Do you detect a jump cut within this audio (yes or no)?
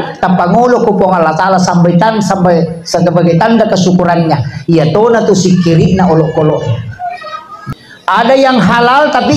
yes